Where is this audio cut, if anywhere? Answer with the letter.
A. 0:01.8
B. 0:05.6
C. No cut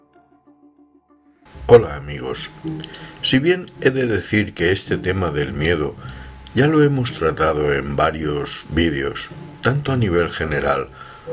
A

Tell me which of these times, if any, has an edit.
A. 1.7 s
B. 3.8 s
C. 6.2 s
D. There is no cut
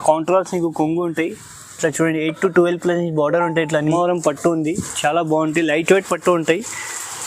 B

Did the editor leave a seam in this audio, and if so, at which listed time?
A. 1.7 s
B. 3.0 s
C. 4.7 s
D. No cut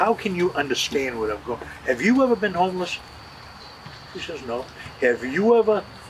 D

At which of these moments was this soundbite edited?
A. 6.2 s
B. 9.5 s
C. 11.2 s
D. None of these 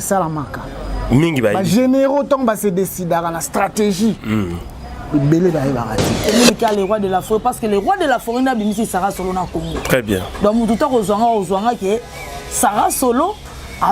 A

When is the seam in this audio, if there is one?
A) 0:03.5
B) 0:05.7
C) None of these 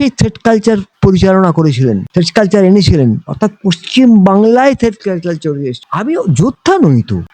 B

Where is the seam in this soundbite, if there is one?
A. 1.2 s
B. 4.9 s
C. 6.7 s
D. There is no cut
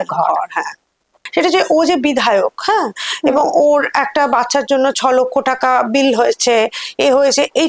A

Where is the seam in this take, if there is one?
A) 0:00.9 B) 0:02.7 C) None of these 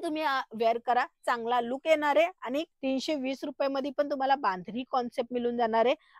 B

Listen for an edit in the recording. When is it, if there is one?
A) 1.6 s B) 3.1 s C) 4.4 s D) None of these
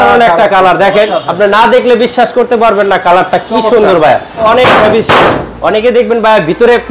C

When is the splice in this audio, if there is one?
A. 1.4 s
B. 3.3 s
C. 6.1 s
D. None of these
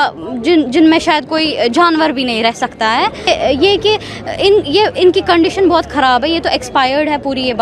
B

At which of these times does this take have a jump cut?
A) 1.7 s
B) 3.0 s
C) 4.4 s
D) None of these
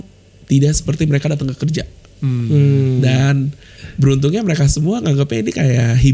B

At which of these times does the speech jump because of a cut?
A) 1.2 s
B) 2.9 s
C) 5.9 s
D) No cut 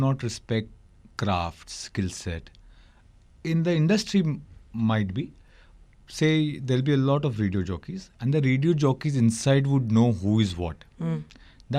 D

